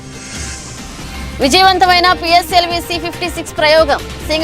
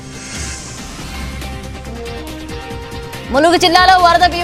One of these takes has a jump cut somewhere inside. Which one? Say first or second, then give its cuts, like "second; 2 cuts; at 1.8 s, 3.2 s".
first; 1 cut; at 0.9 s